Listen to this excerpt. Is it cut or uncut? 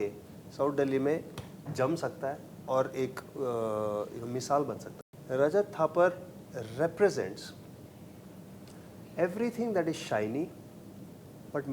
cut